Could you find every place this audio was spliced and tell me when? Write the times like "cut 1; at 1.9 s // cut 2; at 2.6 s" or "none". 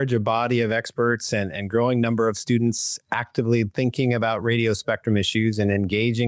none